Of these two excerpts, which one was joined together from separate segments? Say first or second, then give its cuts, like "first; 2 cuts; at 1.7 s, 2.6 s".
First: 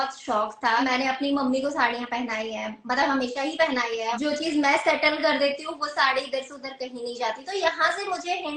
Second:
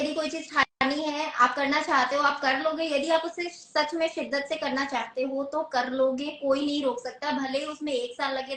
first; 2 cuts; at 0.8 s, 4.2 s